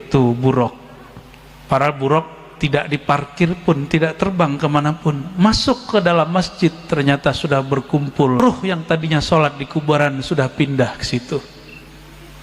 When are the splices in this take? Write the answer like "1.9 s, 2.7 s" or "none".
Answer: 8.4 s